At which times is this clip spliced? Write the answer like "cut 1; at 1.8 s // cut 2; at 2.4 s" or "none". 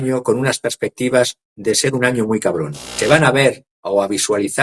cut 1; at 2.9 s